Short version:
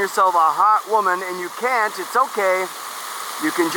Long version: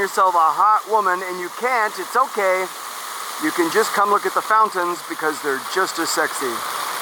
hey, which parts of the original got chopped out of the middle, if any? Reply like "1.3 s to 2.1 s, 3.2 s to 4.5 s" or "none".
none